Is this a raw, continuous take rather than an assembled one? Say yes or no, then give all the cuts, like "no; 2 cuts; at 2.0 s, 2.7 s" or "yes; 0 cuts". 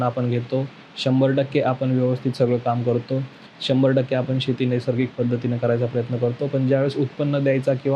yes; 0 cuts